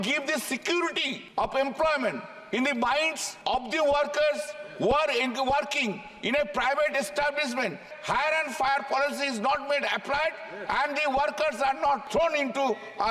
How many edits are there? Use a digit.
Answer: 4